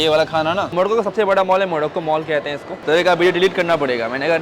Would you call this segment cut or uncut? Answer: cut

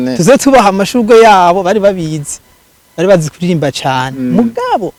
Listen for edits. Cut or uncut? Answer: uncut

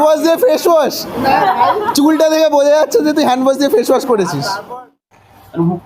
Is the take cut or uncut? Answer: cut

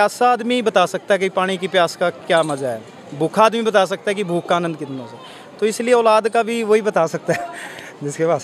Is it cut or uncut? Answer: uncut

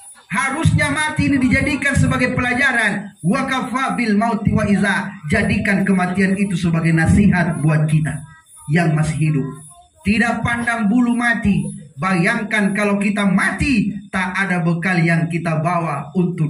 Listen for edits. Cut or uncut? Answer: uncut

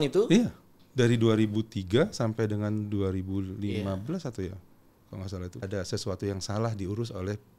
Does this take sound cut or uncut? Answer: cut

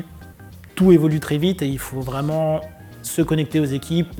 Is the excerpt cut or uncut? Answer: uncut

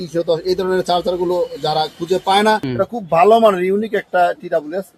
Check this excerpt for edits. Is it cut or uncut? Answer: cut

